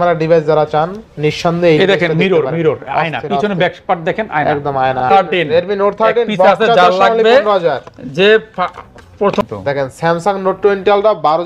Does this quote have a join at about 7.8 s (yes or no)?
no